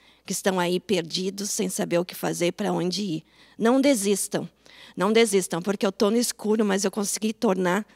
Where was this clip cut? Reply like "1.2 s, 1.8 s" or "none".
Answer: none